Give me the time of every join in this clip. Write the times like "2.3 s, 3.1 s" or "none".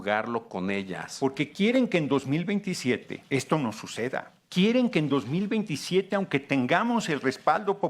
1.0 s, 3.1 s, 4.4 s